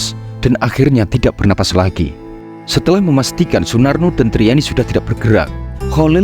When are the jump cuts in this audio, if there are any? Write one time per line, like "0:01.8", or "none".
0:02.5